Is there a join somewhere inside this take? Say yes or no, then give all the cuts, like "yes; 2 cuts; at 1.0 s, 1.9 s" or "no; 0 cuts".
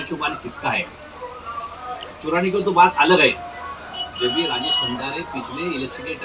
no; 0 cuts